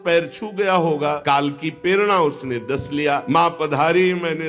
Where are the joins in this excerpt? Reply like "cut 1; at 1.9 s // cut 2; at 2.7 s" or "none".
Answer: cut 1; at 1.2 s // cut 2; at 3.2 s